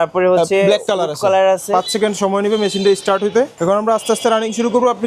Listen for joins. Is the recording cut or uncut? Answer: cut